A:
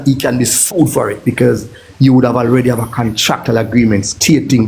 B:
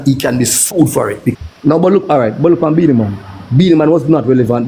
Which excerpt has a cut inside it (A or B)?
B